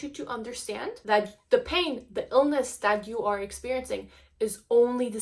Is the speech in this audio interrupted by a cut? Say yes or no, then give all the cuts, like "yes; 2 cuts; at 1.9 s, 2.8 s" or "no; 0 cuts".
yes; 1 cut; at 0.9 s